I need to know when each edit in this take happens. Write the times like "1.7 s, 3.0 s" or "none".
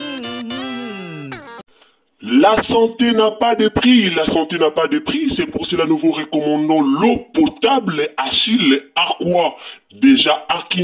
1.6 s